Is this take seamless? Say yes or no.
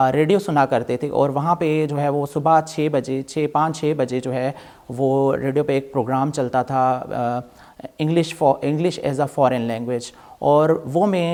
yes